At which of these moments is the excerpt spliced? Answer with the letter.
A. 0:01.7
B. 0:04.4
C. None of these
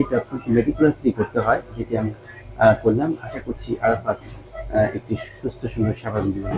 C